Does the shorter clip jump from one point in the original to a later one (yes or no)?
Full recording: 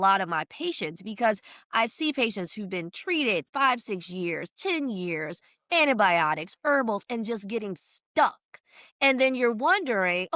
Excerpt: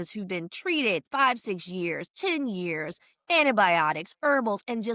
no